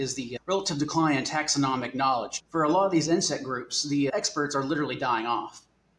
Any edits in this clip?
yes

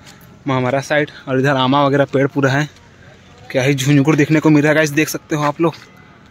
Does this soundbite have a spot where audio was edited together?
no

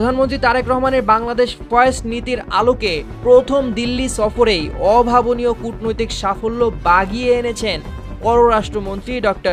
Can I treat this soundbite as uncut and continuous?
yes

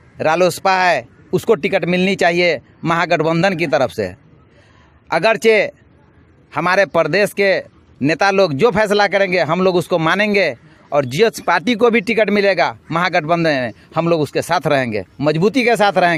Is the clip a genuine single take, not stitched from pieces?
yes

